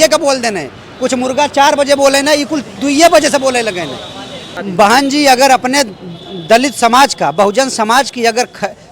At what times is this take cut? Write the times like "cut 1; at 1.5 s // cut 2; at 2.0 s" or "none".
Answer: cut 1; at 4.6 s

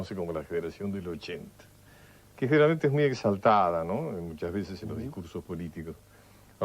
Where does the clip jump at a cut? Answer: cut 1; at 1.3 s

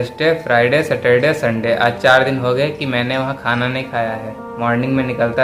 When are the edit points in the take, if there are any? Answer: none

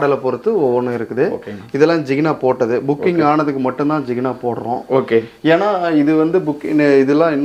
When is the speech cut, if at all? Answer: none

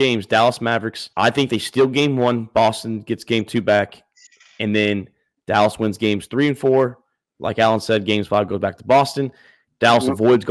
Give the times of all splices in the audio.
cut 1; at 1.0 s

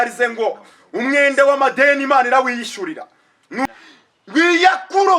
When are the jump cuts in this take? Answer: cut 1; at 3.7 s

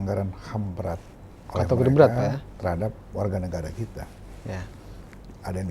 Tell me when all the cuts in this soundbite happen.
none

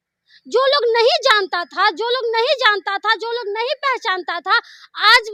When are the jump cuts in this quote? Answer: none

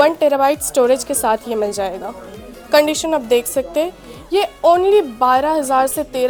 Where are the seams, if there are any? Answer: none

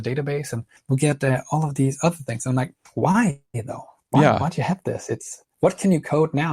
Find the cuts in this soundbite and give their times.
none

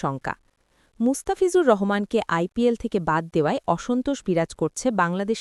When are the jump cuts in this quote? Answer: none

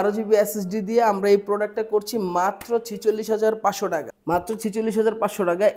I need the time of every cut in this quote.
cut 1; at 4.1 s

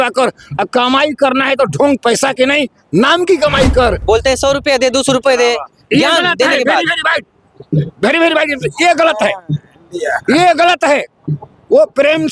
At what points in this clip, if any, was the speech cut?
cut 1; at 4.0 s

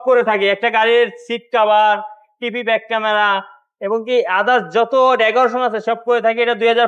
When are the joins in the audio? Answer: none

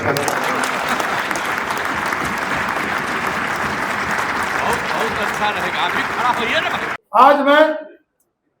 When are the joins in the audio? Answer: cut 1; at 7.0 s

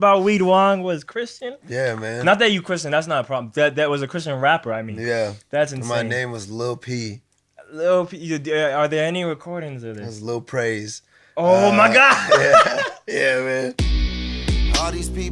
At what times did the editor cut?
cut 1; at 13.8 s

